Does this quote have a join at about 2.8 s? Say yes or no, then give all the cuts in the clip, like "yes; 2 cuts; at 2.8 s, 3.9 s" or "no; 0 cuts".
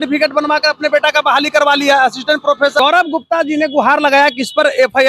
yes; 1 cut; at 2.8 s